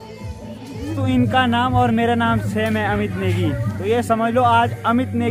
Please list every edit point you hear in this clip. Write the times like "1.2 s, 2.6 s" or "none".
0.9 s